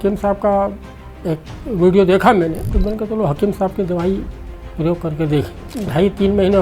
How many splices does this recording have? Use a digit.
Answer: 2